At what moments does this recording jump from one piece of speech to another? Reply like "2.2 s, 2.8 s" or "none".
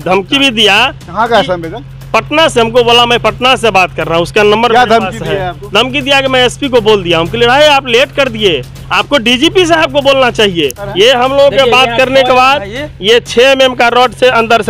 10.8 s